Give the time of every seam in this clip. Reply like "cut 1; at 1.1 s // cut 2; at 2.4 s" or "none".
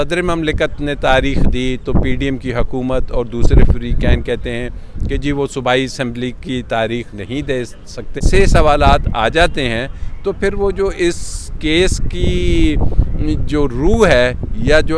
cut 1; at 8.2 s